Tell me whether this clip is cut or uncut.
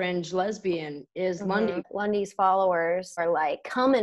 cut